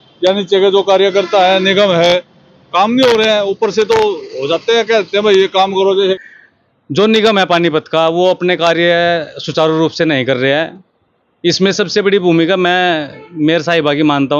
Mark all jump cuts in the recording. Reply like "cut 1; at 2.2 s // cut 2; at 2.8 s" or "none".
cut 1; at 6.2 s